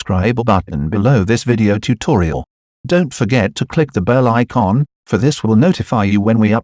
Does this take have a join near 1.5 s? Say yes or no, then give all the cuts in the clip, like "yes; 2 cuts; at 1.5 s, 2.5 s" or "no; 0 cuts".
no; 0 cuts